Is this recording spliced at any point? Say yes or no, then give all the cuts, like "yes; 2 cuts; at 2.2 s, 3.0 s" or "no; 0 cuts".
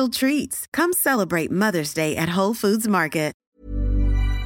yes; 1 cut; at 3.4 s